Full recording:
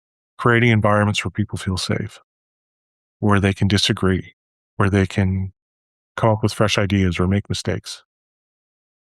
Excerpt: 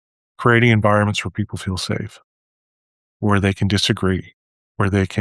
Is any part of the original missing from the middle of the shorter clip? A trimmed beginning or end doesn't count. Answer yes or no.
no